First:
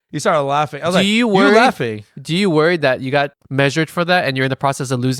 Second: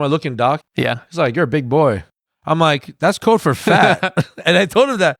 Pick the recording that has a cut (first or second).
first